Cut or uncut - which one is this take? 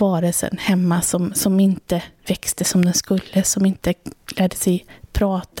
uncut